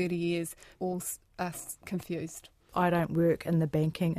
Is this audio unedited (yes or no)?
no